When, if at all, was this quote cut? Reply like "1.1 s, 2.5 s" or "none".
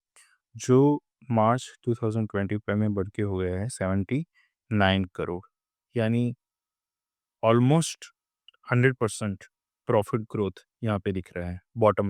none